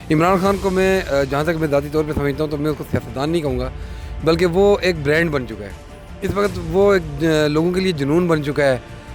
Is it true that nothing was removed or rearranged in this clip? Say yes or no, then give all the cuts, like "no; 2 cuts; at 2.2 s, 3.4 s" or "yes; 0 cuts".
yes; 0 cuts